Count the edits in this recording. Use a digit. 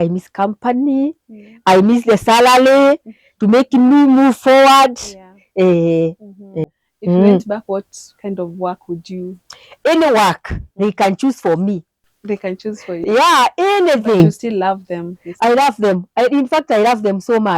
1